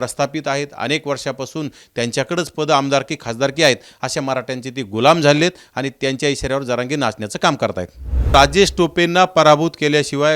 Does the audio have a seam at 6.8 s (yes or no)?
no